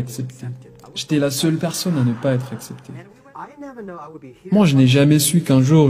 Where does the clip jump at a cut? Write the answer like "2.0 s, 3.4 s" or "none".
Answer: 3.1 s